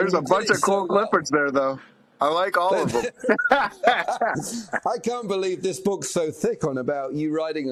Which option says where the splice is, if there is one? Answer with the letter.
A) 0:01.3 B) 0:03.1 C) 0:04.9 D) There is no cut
D